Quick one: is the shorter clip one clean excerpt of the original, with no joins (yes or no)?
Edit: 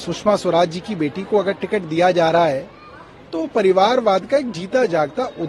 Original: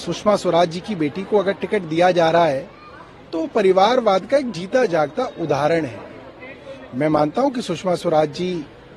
yes